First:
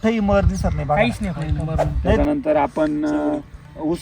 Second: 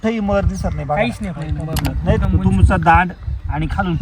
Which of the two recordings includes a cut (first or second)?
first